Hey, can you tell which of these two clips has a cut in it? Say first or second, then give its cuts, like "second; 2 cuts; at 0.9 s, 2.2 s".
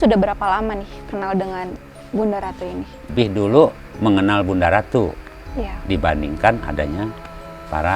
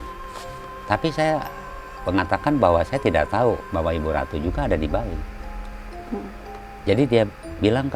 first; 1 cut; at 3.1 s